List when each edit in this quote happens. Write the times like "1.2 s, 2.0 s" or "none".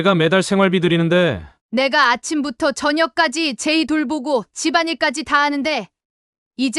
1.5 s